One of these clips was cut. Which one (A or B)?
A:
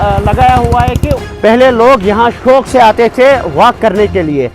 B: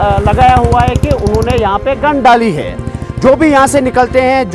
A